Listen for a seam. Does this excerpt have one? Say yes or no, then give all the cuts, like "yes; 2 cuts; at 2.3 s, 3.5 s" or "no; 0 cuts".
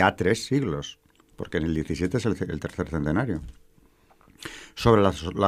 no; 0 cuts